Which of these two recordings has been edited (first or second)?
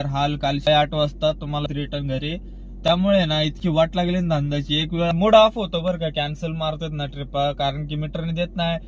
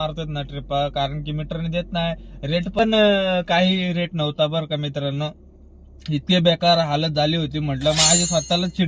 first